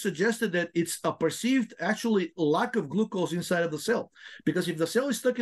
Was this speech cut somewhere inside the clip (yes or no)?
no